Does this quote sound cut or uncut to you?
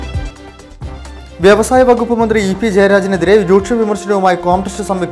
cut